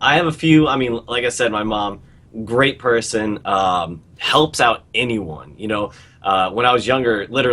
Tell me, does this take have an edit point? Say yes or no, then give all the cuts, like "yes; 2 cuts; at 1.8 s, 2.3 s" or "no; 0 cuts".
yes; 1 cut; at 4.9 s